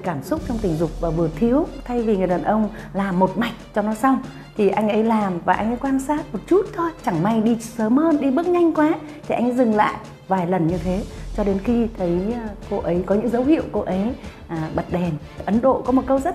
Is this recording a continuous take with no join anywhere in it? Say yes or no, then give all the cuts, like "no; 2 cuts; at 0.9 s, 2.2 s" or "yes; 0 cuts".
no; 4 cuts; at 1.8 s, 7.0 s, 10.1 s, 15.4 s